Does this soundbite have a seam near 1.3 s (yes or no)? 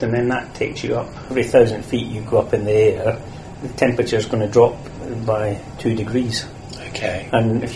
yes